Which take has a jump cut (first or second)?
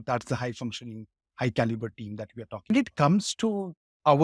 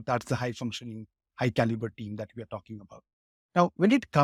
first